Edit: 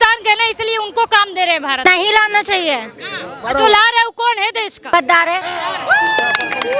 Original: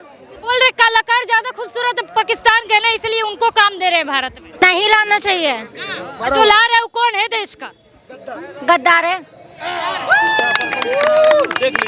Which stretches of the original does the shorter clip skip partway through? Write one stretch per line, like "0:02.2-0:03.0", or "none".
0:04.2-0:04.5
0:07.7-0:08.7
0:09.2-0:09.7